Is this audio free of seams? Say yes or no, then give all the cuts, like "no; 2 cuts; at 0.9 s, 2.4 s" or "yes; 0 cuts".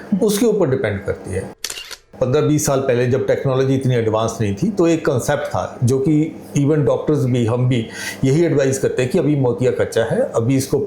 no; 1 cut; at 1.9 s